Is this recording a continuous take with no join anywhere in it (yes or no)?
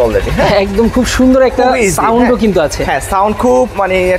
yes